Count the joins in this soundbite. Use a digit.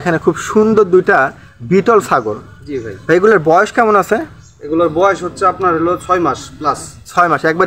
0